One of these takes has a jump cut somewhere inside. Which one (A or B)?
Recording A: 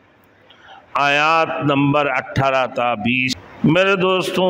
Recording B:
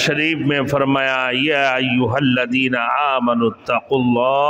A